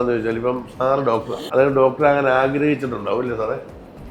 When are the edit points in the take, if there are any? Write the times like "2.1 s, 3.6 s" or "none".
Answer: none